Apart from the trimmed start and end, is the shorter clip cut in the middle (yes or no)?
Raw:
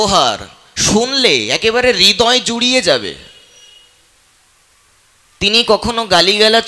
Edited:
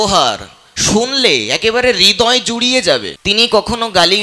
yes